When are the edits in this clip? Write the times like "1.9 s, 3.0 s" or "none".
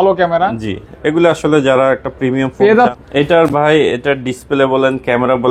2.9 s